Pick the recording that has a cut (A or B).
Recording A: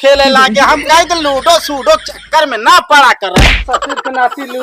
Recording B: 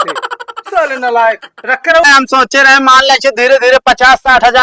B